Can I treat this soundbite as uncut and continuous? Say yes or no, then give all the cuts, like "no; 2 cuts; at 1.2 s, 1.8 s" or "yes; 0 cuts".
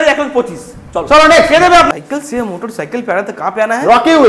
no; 1 cut; at 1.9 s